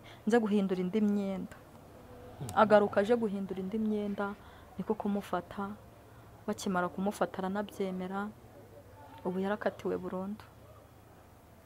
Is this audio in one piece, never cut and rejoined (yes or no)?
yes